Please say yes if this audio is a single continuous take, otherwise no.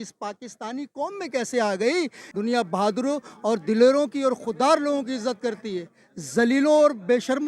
no